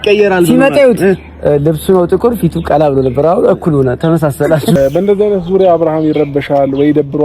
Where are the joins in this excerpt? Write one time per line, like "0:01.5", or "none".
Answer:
0:04.8